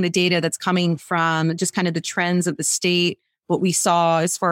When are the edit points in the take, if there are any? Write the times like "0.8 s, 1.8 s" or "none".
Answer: none